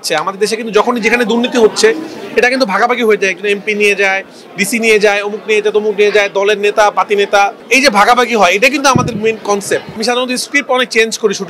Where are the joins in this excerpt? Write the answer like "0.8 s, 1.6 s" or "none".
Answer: 7.6 s, 10.0 s